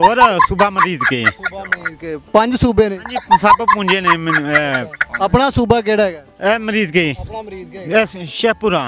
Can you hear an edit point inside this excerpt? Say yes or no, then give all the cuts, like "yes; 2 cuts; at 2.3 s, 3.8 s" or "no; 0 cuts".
no; 0 cuts